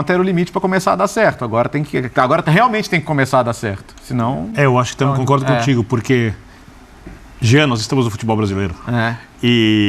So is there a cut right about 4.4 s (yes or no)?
no